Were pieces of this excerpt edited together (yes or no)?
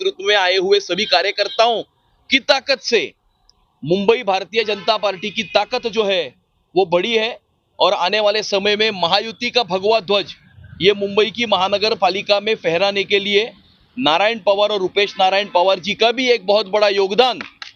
no